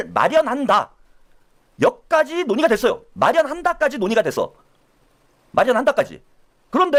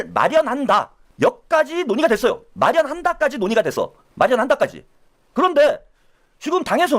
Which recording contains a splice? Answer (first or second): second